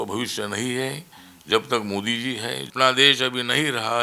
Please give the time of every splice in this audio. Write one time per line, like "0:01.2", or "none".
0:02.6